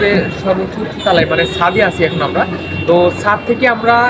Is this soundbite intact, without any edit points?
yes; 0 cuts

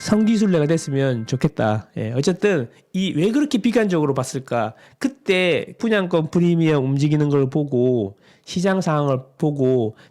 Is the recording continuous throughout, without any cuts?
yes; 0 cuts

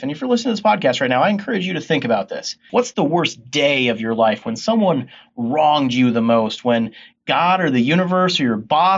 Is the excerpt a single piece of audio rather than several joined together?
no; 1 cut; at 2.6 s

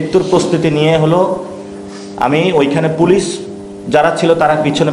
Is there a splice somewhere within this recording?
no; 0 cuts

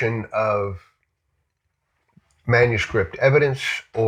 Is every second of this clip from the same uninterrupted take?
yes; 0 cuts

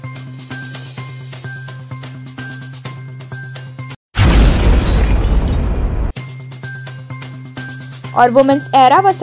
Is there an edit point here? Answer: yes; 1 cut; at 2.0 s

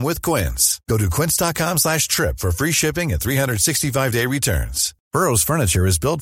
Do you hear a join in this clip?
no; 0 cuts

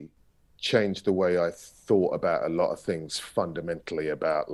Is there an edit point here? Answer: no; 0 cuts

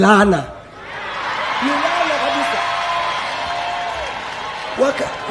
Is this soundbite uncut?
yes; 0 cuts

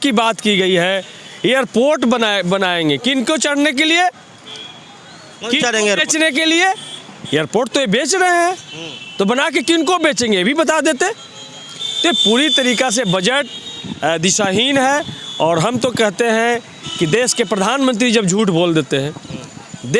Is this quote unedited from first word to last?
yes; 0 cuts

